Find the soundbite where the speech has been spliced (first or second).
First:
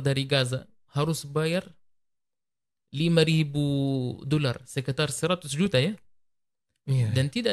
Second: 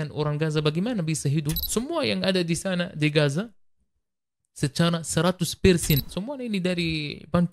second